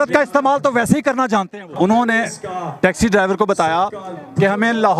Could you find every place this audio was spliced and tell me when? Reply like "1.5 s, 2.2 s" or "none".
1.7 s